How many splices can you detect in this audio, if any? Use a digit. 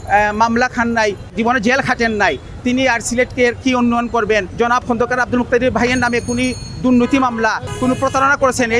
3